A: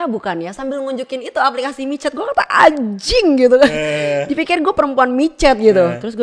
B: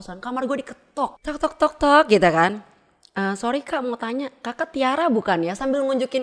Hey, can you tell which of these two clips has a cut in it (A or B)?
B